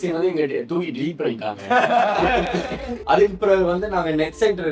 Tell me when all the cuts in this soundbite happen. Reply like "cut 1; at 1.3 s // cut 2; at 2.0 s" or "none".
cut 1; at 2.9 s